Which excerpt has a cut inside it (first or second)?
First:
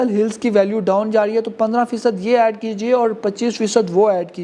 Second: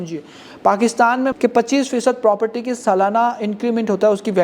second